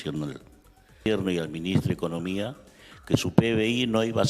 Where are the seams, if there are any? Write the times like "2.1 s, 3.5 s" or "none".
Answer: 1.1 s